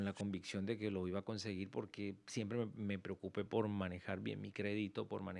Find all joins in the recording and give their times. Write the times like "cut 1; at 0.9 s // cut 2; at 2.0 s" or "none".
none